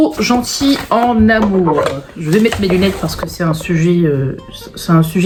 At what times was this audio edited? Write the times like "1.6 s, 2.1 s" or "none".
none